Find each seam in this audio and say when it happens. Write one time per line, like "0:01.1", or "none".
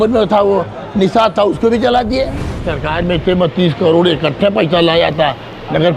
0:02.8

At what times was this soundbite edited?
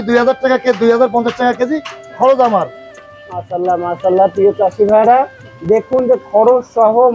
none

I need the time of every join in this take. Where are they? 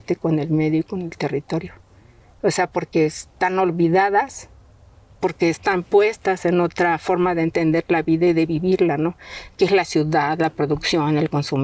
none

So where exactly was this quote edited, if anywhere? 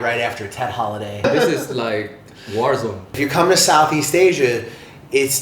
0:01.2
0:03.2

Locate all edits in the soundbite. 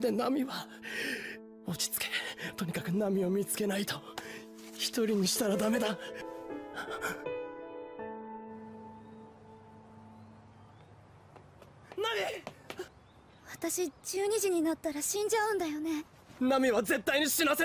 0:08.6

